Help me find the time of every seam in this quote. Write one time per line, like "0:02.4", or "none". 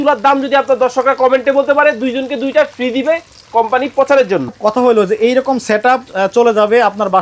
0:04.5